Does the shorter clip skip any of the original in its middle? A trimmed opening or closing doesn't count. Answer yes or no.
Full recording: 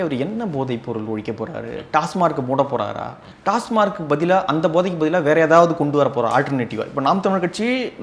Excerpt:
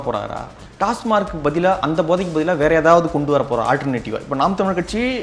no